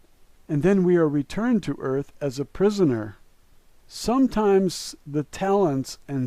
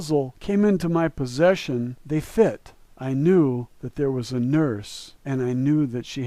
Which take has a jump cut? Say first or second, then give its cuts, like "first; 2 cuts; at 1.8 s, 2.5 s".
first; 1 cut; at 1.9 s